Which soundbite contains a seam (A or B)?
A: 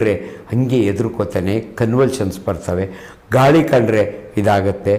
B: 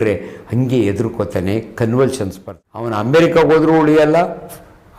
B